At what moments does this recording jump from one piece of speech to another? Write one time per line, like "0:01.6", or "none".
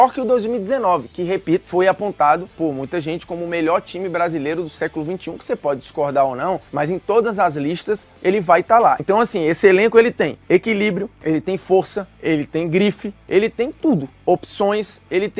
0:09.0